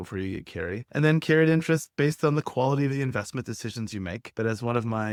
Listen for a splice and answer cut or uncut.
uncut